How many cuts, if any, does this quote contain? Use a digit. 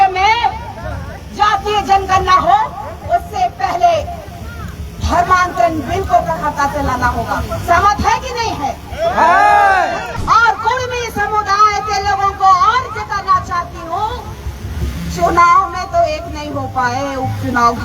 1